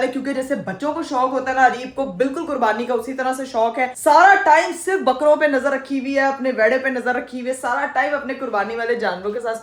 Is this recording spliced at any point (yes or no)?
no